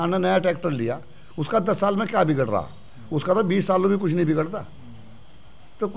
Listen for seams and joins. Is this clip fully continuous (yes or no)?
yes